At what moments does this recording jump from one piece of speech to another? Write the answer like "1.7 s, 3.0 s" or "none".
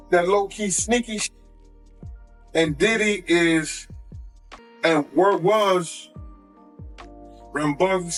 none